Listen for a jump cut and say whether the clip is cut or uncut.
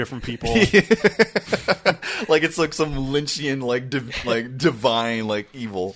uncut